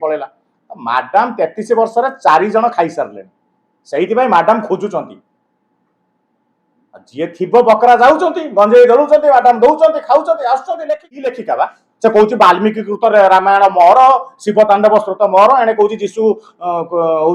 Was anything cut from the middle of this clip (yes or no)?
yes